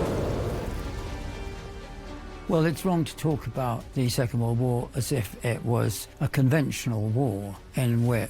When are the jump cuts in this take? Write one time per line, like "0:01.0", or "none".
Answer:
none